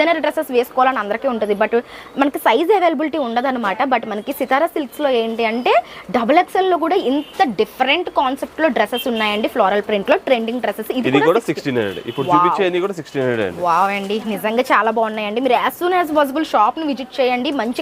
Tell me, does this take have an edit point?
no; 0 cuts

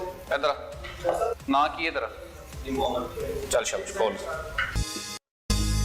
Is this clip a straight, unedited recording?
no; 1 cut; at 4.8 s

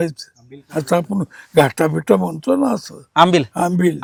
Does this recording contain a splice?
no; 0 cuts

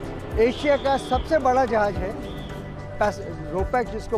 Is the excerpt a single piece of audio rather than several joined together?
yes; 0 cuts

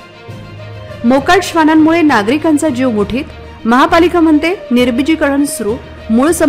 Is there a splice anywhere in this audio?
no; 0 cuts

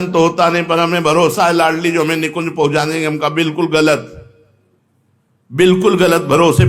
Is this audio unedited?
yes; 0 cuts

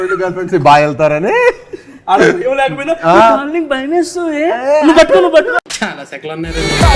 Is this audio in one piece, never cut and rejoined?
no; 1 cut; at 5.7 s

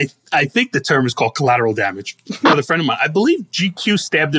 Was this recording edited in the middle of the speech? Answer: yes; 1 cut; at 2.5 s

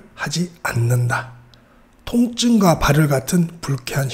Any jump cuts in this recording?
no; 0 cuts

